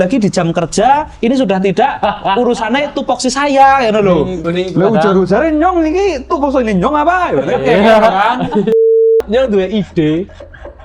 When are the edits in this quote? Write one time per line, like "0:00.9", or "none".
0:04.4
0:09.1